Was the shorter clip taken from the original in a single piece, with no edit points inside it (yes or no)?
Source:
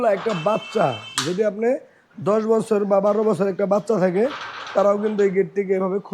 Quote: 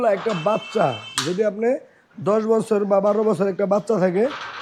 yes